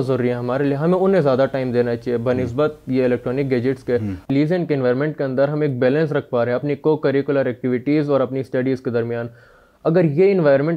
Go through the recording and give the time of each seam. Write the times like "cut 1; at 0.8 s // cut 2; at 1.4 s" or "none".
cut 1; at 4.3 s